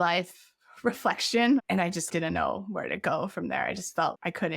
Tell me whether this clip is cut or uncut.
cut